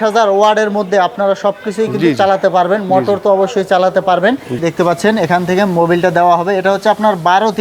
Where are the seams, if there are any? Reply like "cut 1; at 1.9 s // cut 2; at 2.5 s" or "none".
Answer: cut 1; at 4.6 s